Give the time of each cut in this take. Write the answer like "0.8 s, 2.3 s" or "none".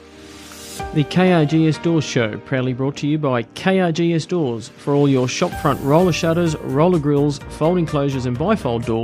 0.9 s